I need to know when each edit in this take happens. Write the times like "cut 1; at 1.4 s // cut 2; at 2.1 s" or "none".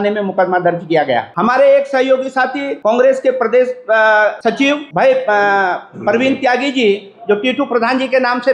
cut 1; at 1.3 s // cut 2; at 2.7 s // cut 3; at 4.5 s